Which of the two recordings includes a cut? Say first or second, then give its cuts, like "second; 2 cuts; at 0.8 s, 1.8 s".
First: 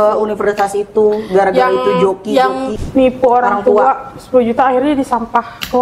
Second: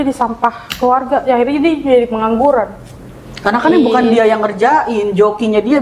first; 1 cut; at 2.7 s